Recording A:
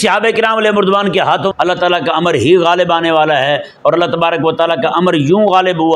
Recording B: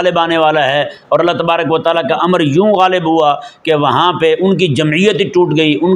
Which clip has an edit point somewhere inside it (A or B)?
A